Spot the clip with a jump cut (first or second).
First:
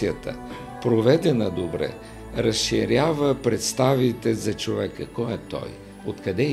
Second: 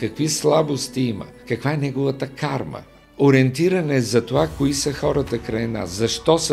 second